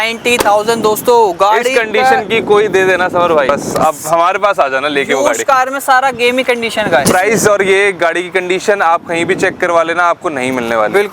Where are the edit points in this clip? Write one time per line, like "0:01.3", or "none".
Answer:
none